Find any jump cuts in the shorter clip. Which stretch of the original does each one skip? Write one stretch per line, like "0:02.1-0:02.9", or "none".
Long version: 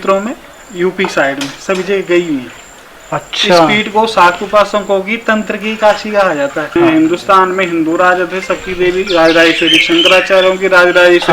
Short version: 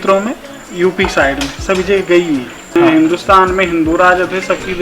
0:02.6-0:06.6